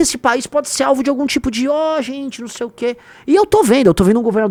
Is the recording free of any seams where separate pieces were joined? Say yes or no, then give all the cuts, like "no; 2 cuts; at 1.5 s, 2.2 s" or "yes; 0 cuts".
yes; 0 cuts